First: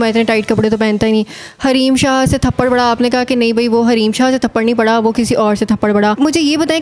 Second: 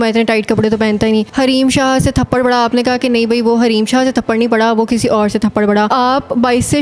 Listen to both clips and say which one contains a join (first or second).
second